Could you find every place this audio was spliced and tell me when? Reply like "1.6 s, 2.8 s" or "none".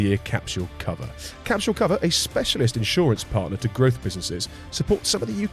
none